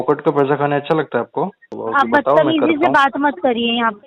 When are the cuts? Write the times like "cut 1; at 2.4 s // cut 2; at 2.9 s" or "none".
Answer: cut 1; at 1.7 s